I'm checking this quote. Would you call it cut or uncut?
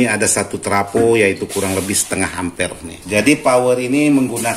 cut